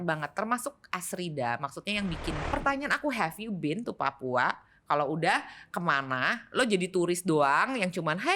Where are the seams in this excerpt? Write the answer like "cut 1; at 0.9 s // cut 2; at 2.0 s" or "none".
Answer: cut 1; at 2.4 s